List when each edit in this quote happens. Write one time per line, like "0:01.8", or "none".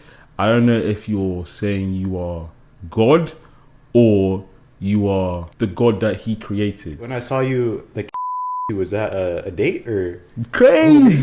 0:05.5
0:07.1

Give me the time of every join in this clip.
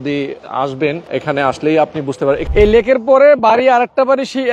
0:01.0
0:02.5

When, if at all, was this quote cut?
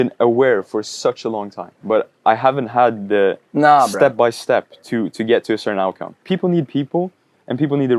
0:06.2

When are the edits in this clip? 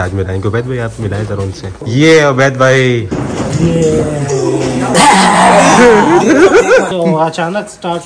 0:01.8
0:04.9
0:06.9

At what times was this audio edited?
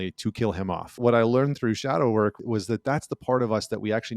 0:00.9
0:02.4

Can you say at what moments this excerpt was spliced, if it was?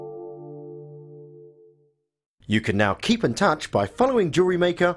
0:02.2

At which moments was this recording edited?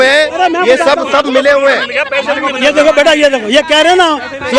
none

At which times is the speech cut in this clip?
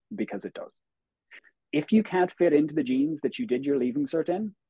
0:01.5

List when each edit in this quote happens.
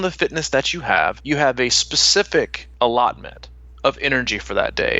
0:01.2
0:02.6

